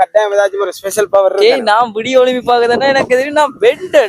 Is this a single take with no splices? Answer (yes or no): yes